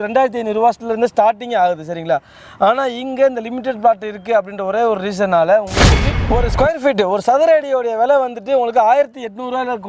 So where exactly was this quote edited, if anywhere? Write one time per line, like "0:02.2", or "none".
none